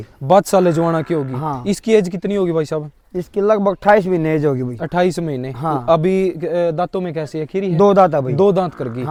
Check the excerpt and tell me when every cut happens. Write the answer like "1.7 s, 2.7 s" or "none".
none